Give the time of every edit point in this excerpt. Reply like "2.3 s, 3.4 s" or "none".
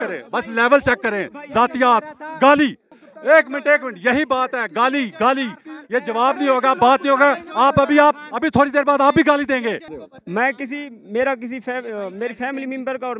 none